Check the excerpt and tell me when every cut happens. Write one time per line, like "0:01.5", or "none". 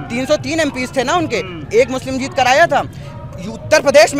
none